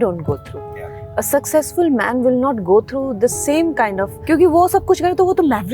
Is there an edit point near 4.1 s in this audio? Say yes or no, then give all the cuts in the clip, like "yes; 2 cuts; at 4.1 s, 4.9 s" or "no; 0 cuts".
yes; 1 cut; at 4.1 s